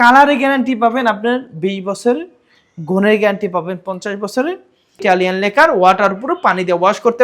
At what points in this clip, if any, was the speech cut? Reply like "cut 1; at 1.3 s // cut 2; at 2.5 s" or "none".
cut 1; at 5.0 s